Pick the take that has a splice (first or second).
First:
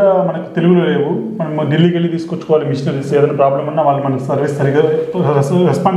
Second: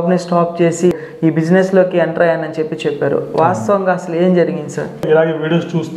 second